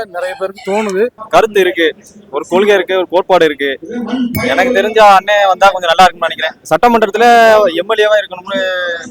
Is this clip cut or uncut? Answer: cut